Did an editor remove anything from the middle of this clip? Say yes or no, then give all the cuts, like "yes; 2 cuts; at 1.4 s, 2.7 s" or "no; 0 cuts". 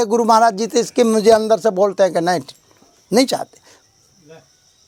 no; 0 cuts